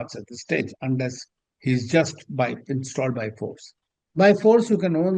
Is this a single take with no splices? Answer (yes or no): yes